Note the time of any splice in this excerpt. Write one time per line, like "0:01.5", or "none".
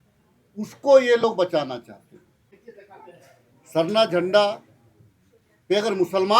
0:02.6